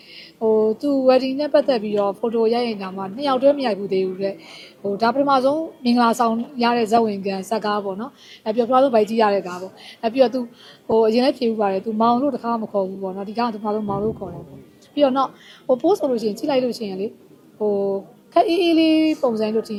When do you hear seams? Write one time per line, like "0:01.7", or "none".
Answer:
none

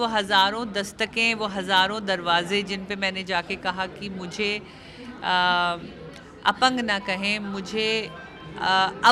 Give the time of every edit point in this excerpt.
none

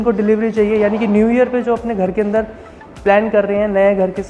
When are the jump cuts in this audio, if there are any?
none

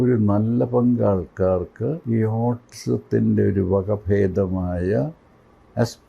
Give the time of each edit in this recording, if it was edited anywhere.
0:02.0

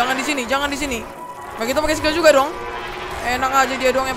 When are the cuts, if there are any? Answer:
0:01.5

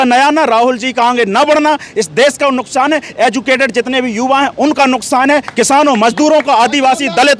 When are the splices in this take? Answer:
none

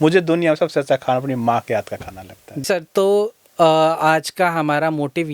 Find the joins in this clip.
0:02.6

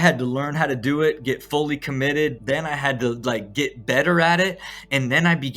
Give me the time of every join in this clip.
0:02.4

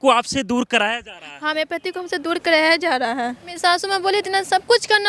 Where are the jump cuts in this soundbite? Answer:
0:03.5

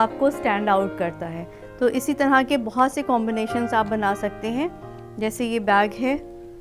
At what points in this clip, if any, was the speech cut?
none

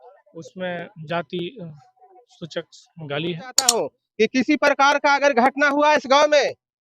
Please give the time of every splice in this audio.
0:03.7

